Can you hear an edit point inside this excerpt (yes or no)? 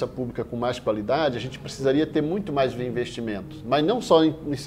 no